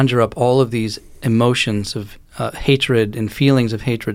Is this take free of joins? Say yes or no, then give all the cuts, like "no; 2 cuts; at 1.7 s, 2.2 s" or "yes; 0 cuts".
yes; 0 cuts